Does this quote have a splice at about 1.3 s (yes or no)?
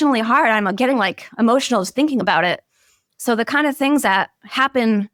no